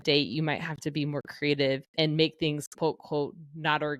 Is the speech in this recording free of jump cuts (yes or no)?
yes